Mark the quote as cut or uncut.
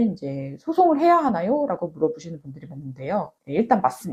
uncut